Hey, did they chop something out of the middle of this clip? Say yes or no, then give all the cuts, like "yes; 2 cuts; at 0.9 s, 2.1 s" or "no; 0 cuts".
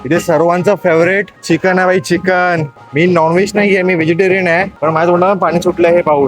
yes; 3 cuts; at 1.3 s, 2.8 s, 4.7 s